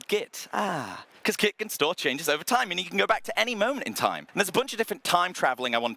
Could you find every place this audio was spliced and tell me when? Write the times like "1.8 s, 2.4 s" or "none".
4.2 s